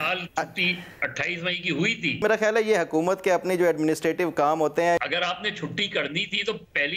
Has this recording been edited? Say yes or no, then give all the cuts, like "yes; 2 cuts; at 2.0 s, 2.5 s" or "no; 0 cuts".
yes; 2 cuts; at 2.2 s, 5.0 s